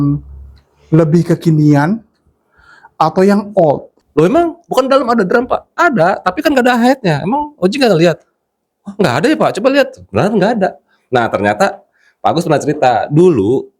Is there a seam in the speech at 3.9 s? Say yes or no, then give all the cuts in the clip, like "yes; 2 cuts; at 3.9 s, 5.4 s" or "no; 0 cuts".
yes; 1 cut; at 3.9 s